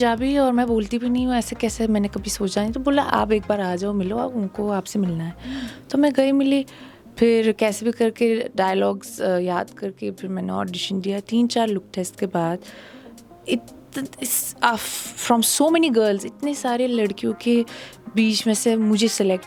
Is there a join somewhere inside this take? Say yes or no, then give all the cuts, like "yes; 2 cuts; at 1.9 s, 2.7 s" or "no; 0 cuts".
no; 0 cuts